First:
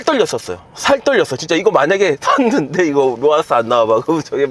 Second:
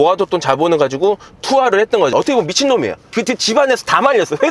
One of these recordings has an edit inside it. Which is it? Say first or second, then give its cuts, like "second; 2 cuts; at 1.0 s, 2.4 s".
second; 1 cut; at 3.0 s